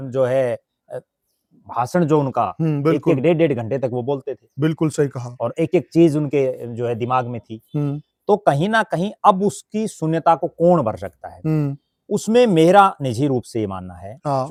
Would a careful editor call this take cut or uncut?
uncut